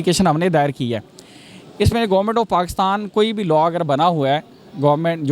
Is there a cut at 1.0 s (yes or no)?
no